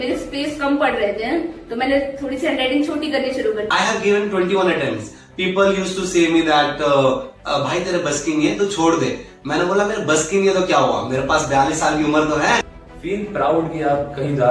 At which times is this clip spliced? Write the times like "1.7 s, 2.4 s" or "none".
3.7 s, 12.8 s